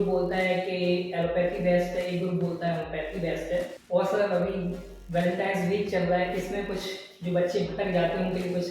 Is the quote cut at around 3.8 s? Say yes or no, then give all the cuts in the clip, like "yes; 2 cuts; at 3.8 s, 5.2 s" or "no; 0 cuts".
yes; 1 cut; at 3.8 s